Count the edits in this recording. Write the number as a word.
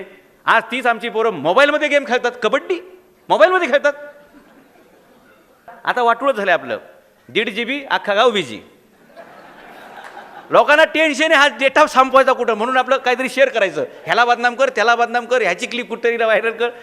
one